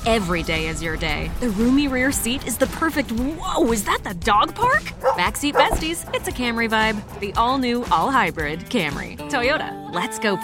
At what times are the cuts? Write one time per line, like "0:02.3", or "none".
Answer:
none